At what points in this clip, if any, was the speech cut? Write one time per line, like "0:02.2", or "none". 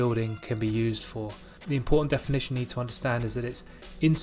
0:01.4